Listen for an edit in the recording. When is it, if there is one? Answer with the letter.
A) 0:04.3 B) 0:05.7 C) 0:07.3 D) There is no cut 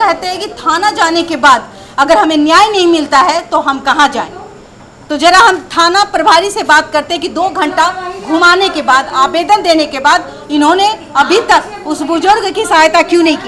D